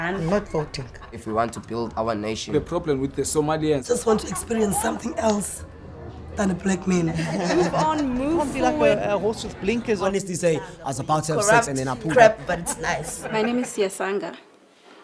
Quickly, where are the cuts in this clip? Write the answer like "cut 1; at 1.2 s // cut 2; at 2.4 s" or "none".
none